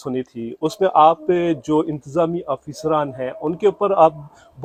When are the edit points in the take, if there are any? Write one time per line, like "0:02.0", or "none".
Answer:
none